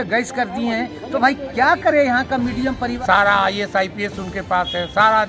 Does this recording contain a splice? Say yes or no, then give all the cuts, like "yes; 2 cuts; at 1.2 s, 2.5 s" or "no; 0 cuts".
yes; 1 cut; at 2.9 s